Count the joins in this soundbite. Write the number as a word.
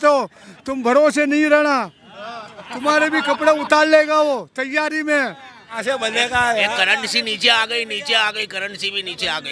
one